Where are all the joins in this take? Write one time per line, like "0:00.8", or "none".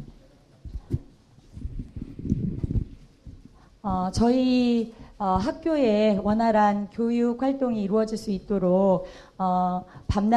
none